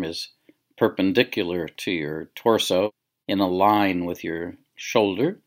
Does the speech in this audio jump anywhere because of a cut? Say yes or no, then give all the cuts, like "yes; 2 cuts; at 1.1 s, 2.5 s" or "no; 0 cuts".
no; 0 cuts